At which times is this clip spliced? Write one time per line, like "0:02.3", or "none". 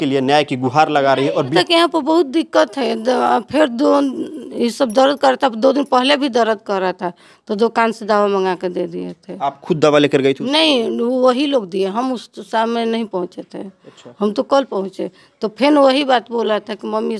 0:01.5